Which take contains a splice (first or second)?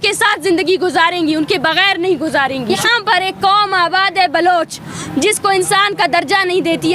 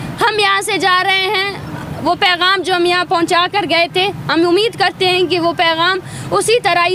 first